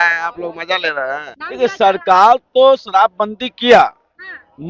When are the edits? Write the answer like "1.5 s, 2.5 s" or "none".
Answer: 1.4 s